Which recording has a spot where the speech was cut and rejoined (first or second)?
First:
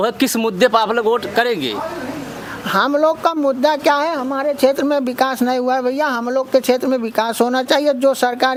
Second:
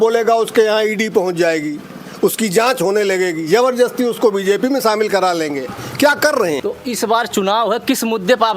second